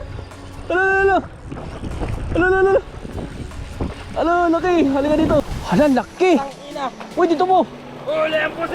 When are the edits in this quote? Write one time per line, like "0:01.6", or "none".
0:05.5